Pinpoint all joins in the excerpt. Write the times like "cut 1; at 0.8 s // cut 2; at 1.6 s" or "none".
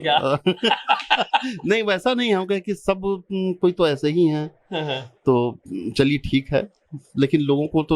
none